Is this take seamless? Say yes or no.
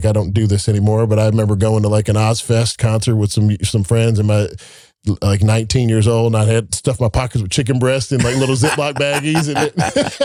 yes